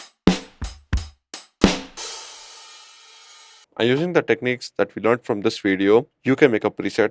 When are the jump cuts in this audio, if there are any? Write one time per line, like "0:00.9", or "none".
0:03.6
0:06.1